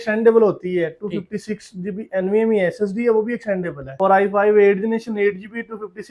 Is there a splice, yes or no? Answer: no